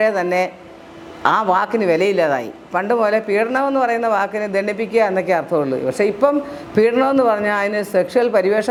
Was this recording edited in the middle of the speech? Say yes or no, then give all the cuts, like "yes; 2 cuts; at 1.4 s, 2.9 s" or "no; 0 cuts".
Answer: no; 0 cuts